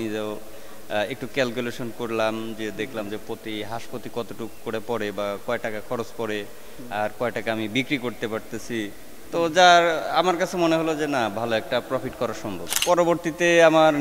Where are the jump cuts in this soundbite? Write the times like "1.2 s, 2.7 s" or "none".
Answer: 12.8 s